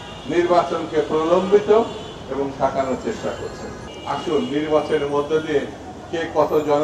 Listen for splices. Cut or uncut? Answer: cut